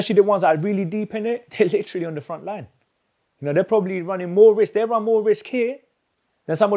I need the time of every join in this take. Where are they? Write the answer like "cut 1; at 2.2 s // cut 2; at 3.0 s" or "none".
cut 1; at 1.5 s